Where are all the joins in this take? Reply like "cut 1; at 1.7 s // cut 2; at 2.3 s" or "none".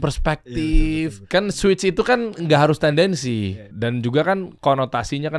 cut 1; at 1.3 s // cut 2; at 3.6 s // cut 3; at 4.5 s